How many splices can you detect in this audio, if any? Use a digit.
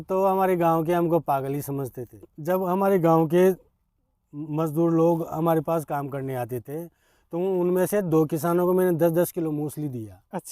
1